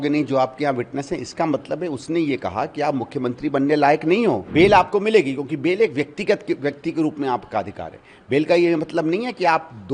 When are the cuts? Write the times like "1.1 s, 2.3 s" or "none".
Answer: 4.4 s